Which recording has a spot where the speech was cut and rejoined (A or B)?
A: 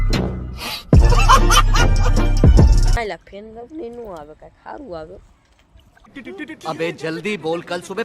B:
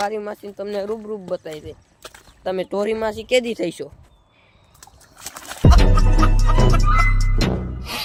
A